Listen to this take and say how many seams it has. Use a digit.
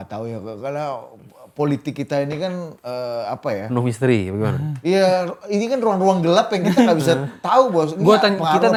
0